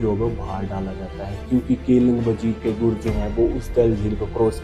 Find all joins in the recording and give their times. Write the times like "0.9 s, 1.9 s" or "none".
none